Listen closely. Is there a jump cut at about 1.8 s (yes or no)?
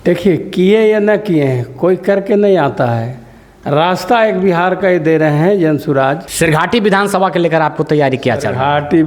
no